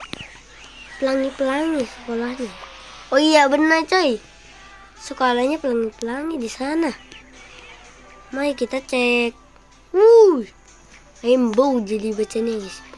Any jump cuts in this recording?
no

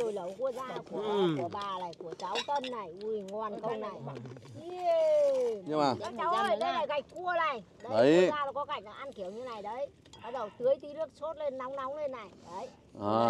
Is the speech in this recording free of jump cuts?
no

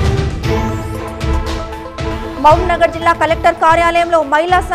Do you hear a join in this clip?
yes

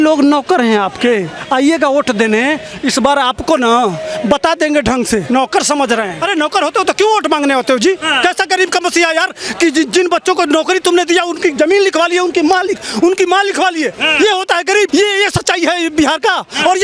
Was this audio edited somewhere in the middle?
yes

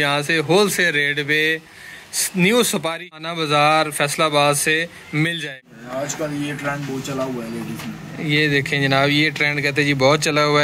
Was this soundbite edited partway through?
yes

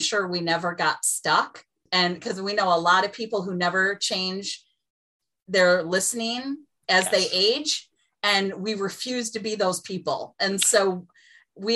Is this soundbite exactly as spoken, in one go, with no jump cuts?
no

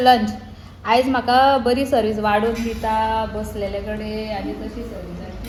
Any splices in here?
no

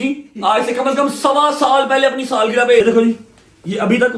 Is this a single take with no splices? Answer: no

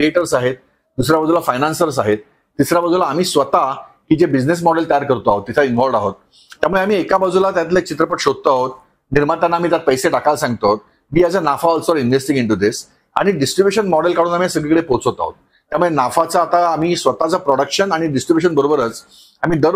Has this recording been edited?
no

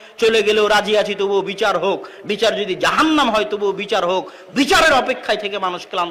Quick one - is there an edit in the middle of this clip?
no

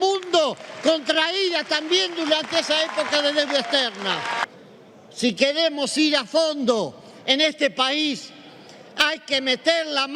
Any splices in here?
yes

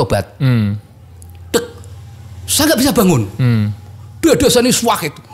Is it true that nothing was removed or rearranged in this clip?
yes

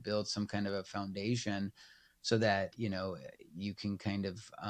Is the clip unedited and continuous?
no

